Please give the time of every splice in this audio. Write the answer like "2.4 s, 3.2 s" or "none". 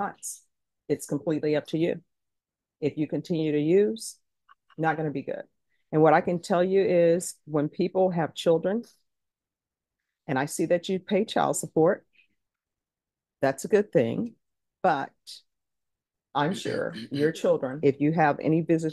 17.7 s